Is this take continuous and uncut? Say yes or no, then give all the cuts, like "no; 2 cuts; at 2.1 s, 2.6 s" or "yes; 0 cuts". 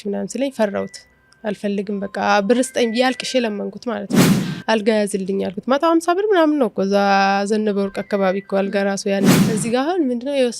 no; 2 cuts; at 4.5 s, 9.4 s